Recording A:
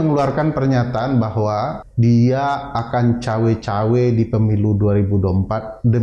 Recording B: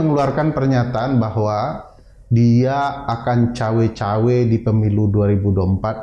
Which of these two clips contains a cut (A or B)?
A